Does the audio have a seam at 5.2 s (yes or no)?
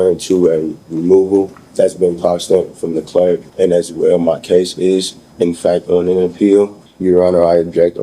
no